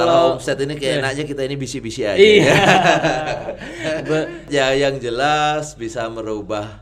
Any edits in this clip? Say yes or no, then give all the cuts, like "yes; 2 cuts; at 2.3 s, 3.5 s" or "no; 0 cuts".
yes; 1 cut; at 4.5 s